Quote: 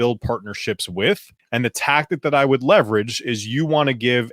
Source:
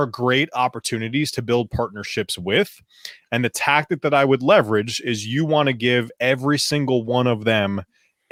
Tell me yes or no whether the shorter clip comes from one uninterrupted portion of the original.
no